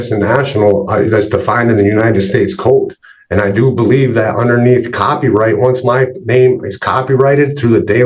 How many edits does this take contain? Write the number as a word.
zero